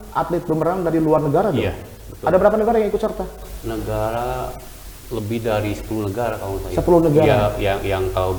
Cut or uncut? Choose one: uncut